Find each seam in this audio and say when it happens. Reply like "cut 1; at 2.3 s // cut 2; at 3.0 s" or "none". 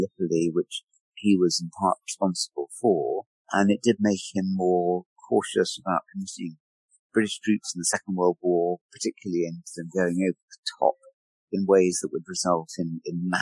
none